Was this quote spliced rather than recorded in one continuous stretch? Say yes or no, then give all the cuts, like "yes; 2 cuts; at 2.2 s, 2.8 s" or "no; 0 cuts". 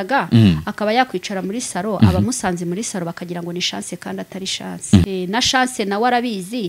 yes; 1 cut; at 5.1 s